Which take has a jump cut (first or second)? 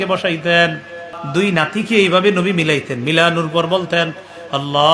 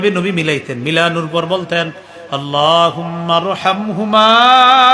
first